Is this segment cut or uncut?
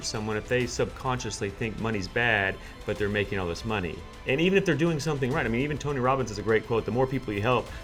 uncut